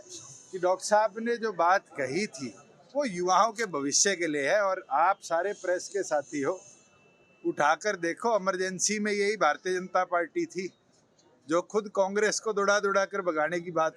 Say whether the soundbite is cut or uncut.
uncut